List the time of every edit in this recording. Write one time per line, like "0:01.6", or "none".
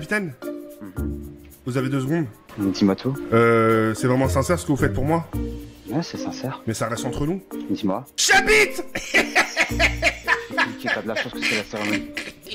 none

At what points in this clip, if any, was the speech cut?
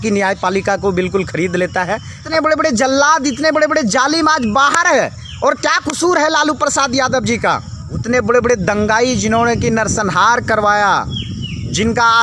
0:02.3
0:08.0

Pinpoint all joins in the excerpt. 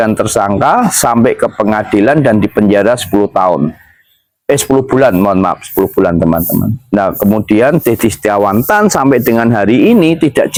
none

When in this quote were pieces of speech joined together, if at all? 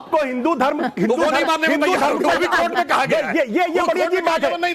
none

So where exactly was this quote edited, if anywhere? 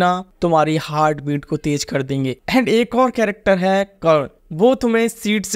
none

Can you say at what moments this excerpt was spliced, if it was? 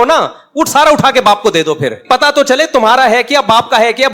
0:02.0

